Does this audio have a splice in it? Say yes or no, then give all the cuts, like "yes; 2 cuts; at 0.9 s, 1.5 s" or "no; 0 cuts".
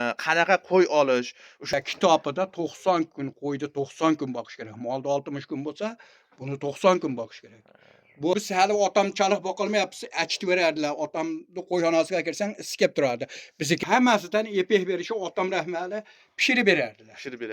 yes; 3 cuts; at 1.7 s, 8.3 s, 13.8 s